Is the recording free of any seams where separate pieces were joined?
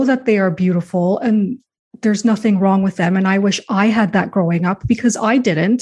yes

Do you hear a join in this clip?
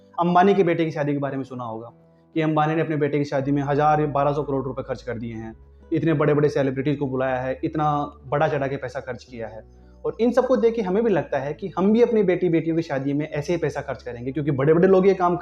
no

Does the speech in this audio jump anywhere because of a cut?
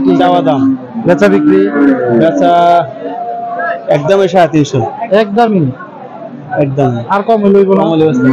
no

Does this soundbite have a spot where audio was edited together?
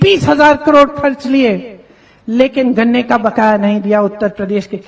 no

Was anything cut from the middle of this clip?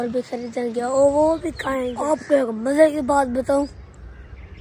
yes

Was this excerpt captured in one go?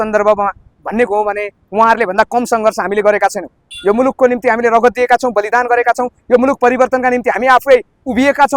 yes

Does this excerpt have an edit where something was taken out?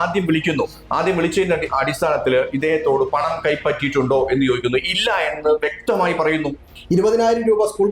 yes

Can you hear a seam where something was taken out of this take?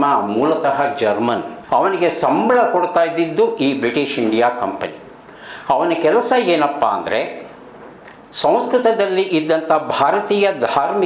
yes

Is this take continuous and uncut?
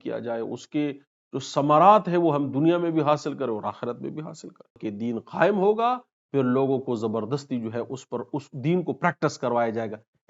no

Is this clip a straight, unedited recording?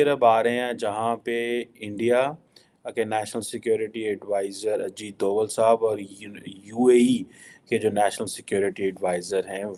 yes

